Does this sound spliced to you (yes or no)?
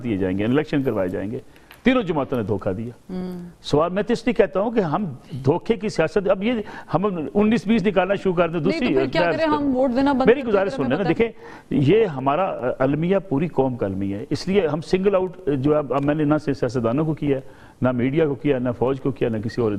no